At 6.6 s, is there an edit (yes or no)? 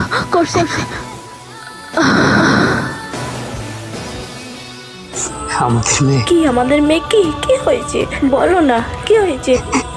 no